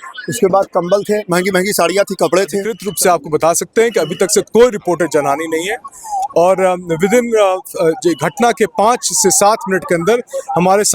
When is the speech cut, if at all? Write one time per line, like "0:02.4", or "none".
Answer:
0:02.8

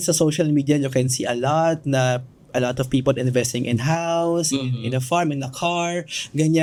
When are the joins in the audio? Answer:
none

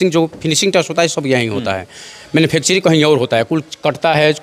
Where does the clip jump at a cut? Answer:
none

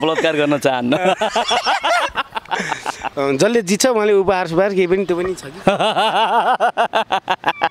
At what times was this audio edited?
0:03.1

